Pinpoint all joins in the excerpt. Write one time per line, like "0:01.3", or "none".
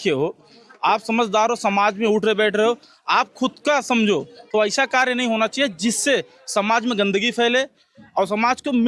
0:04.4

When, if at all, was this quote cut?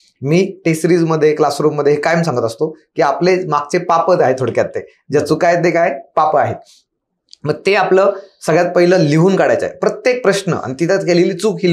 none

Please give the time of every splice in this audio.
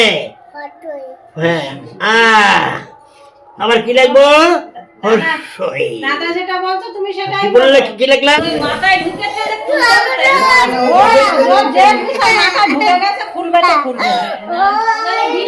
0:08.4

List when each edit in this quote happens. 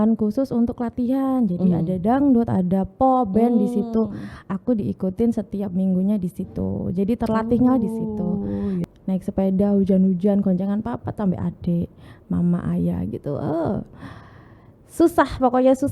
0:08.8

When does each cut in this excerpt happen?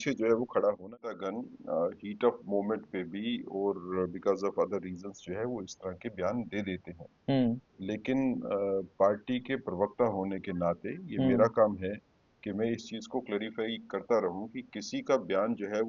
0:01.2

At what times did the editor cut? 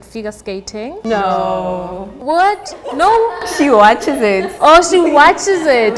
none

